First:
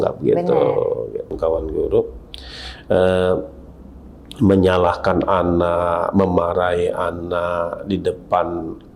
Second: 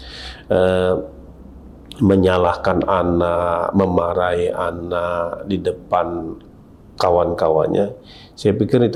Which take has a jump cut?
first; 1 cut; at 1.3 s

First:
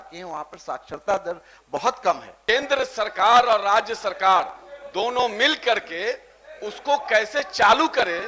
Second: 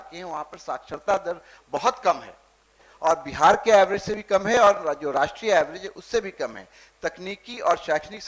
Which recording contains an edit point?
first; 1 cut; at 2.3 s

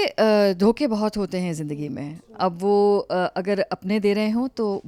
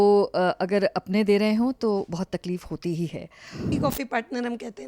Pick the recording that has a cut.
second; 1 cut; at 3.7 s

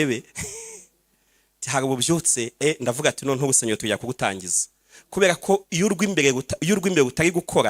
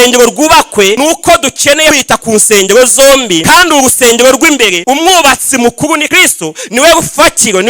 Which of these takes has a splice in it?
second; 5 cuts; at 1.0 s, 2.0 s, 3.4 s, 4.8 s, 6.1 s

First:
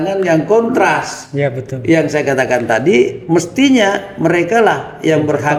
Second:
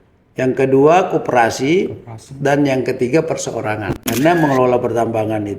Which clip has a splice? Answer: second; 1 cut; at 4.0 s

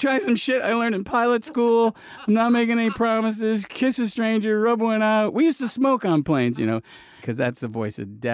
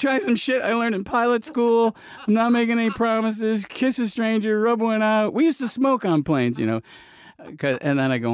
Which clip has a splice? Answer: first; 1 cut; at 7.2 s

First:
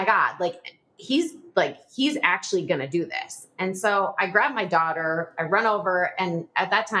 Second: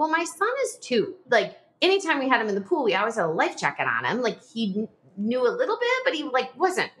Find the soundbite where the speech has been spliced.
second; 1 cut; at 1.2 s

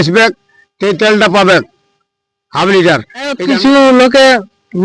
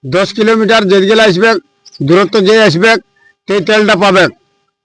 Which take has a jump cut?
first; 1 cut; at 3.4 s

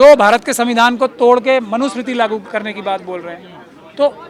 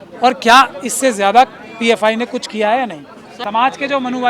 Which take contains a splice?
second; 1 cut; at 3.3 s

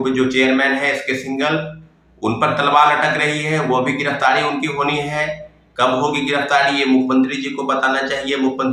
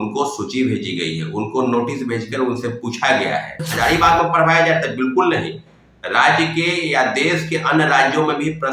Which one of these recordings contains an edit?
second; 1 cut; at 3.6 s

